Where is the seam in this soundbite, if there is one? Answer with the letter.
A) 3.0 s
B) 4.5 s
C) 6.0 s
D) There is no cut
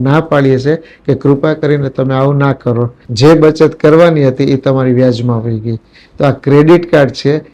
A